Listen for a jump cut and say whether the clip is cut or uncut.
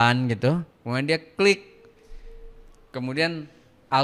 uncut